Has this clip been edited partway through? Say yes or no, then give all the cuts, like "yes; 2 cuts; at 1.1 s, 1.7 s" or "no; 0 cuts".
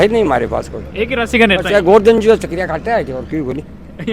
no; 0 cuts